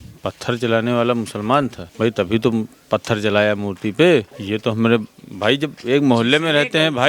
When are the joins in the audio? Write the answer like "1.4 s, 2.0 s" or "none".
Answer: 1.8 s, 4.4 s